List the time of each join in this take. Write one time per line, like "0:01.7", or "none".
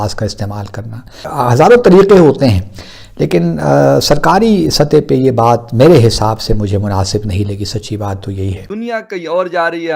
0:01.3
0:08.7